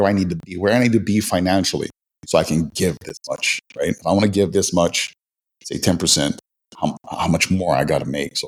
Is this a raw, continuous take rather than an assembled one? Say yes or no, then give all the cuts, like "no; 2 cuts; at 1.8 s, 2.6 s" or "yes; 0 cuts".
yes; 0 cuts